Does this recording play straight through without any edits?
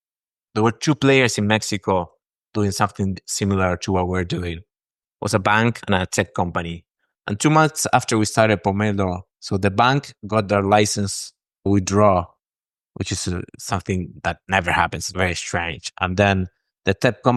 yes; 0 cuts

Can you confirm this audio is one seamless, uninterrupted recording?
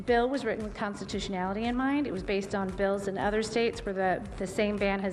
yes; 0 cuts

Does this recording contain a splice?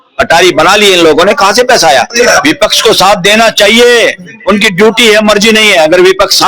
yes; 1 cut; at 2.1 s

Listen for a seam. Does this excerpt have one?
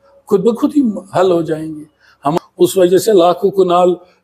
yes; 1 cut; at 2.2 s

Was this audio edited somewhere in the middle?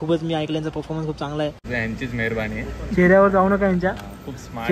yes; 1 cut; at 1.6 s

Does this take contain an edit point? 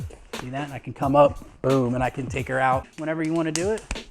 yes; 1 cut; at 2.9 s

